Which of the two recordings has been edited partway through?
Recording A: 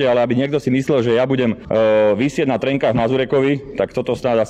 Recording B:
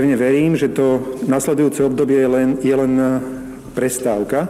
A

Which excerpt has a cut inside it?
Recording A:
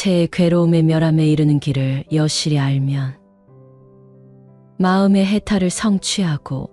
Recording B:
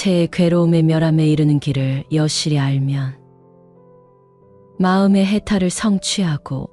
A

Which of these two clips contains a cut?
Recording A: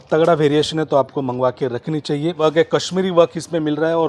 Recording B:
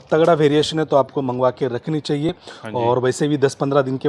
A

